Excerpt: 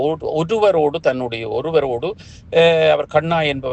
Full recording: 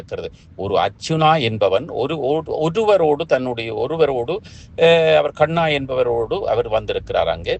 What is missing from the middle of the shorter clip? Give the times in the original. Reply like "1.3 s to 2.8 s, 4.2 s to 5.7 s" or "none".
none